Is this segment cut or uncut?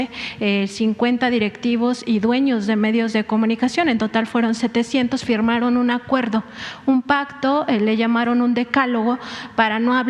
uncut